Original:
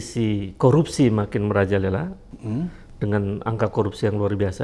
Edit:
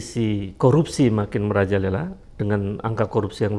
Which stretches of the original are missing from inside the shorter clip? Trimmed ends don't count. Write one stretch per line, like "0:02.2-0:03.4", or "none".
0:02.2-0:02.9